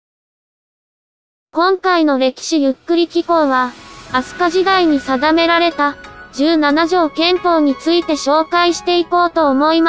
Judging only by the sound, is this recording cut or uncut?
cut